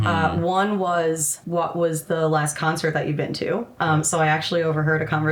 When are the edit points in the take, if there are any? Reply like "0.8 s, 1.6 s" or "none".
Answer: 1.3 s, 3.7 s